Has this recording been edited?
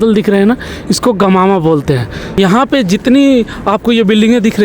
yes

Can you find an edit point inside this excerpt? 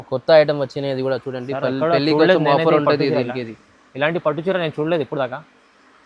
no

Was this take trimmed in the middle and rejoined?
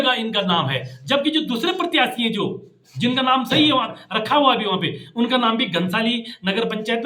no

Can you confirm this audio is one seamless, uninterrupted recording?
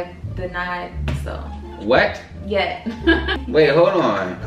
no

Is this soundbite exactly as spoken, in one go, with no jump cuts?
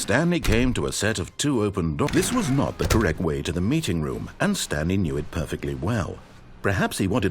no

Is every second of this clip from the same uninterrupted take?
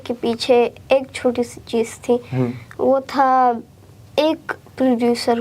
yes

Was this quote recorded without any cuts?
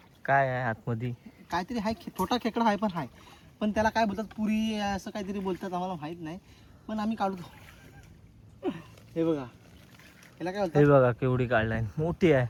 yes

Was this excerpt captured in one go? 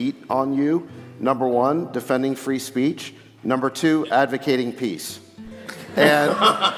yes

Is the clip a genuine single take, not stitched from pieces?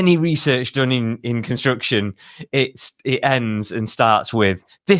yes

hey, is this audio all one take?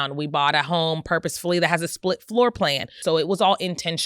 no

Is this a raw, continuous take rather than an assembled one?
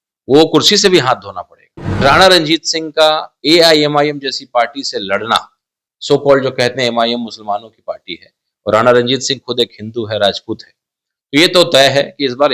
no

